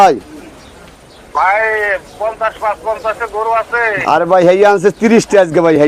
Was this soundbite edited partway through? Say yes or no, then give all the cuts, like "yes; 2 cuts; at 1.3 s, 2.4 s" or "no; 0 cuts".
no; 0 cuts